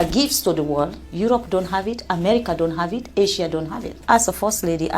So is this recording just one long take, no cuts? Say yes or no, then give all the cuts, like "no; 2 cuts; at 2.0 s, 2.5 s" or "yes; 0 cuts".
no; 2 cuts; at 1.0 s, 4.0 s